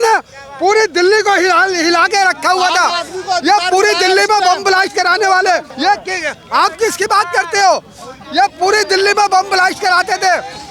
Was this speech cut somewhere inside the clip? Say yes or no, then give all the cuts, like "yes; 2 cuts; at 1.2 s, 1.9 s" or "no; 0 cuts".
yes; 1 cut; at 5.7 s